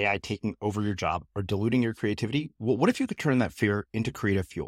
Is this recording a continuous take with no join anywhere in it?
yes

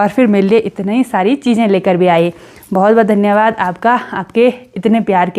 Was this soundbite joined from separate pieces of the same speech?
no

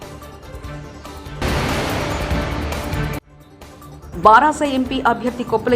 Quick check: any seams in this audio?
yes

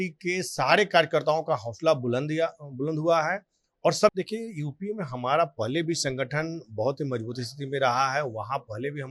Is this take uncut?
no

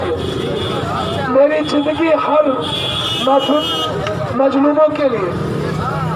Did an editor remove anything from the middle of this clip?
no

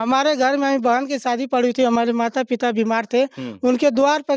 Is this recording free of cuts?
yes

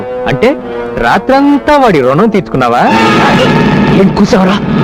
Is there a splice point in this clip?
no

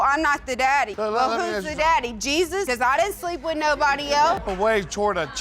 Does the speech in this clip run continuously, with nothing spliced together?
no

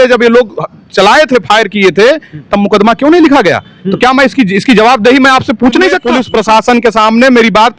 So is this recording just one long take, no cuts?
no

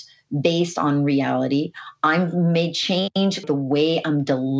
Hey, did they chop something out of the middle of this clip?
yes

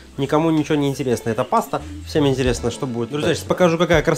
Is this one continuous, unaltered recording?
no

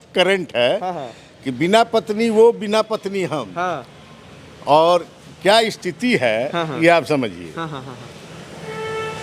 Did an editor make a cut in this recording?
no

